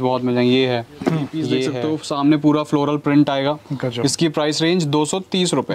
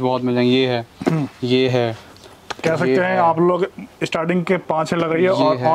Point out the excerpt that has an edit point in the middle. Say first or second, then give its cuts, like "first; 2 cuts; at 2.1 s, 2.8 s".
first; 1 cut; at 1.7 s